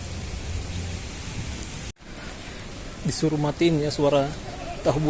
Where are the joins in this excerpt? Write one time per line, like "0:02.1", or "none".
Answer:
0:01.9